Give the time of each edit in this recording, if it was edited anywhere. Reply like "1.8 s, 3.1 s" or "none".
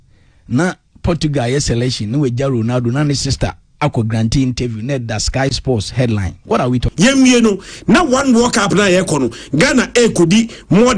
6.9 s